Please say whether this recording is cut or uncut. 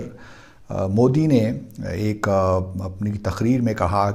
uncut